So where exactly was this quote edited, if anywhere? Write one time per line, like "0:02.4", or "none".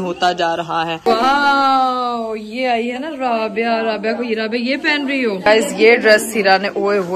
0:00.9
0:05.4